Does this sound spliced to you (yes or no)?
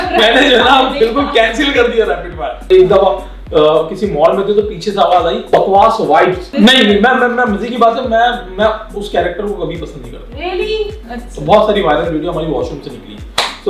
yes